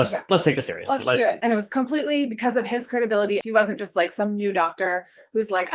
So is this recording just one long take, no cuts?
no; 2 cuts; at 1.4 s, 3.4 s

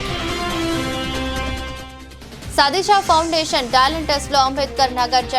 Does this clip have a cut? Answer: no; 0 cuts

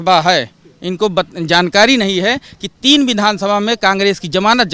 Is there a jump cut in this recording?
no; 0 cuts

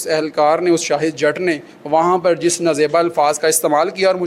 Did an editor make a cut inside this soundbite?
no; 0 cuts

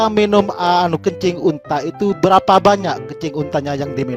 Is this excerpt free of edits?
yes; 0 cuts

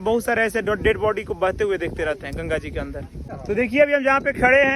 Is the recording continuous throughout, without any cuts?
no; 1 cut; at 3.3 s

